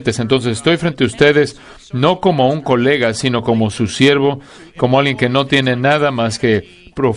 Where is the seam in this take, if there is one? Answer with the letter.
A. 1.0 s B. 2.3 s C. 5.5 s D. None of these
C